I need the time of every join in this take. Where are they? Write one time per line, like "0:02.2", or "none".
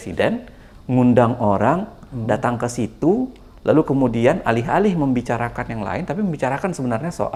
none